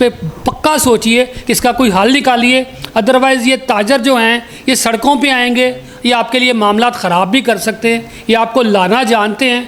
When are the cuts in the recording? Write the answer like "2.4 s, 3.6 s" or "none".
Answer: none